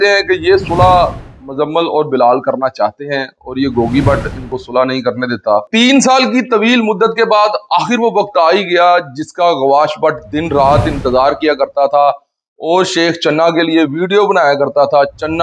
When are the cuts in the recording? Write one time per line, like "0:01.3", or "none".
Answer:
0:05.7